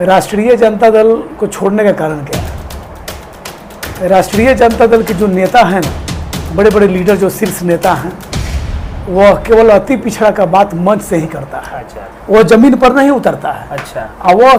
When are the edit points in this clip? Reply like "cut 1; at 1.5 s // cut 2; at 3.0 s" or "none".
none

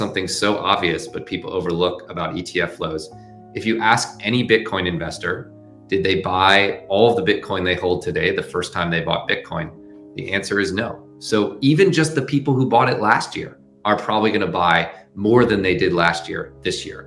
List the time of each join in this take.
none

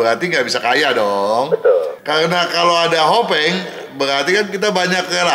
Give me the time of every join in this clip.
cut 1; at 2.0 s

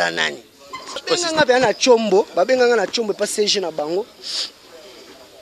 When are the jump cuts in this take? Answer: cut 1; at 1.0 s

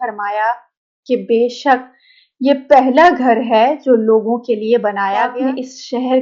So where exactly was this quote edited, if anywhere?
cut 1; at 5.3 s

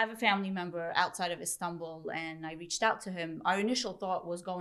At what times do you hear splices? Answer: none

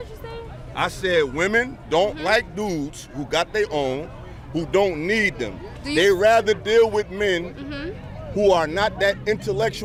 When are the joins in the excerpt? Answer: none

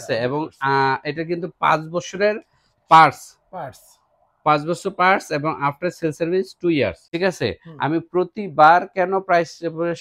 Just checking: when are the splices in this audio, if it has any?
cut 1; at 7.0 s

